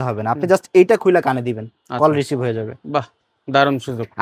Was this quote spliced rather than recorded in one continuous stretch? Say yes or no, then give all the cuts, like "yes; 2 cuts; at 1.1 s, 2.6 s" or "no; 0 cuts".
no; 0 cuts